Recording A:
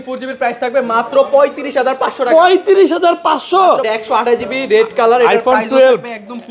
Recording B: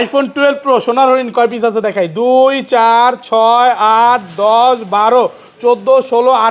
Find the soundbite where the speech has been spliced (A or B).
A